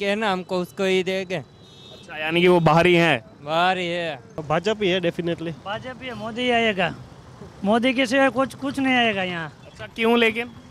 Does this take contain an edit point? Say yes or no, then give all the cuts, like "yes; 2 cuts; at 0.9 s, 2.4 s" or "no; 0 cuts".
yes; 1 cut; at 4.3 s